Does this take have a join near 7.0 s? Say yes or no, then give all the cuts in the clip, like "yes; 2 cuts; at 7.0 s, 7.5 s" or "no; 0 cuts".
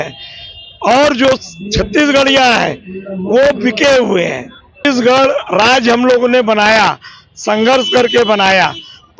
no; 1 cut; at 5.0 s